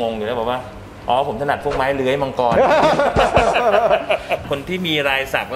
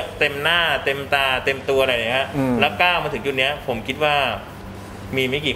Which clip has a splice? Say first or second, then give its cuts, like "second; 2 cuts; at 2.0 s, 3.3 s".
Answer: first; 1 cut; at 4.4 s